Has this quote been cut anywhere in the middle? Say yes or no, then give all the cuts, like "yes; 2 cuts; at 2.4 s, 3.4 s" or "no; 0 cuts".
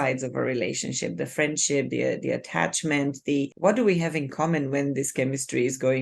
yes; 1 cut; at 3.5 s